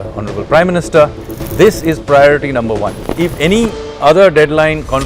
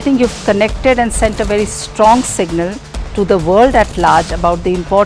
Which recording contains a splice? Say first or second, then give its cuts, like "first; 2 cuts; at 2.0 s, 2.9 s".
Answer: first; 1 cut; at 3.1 s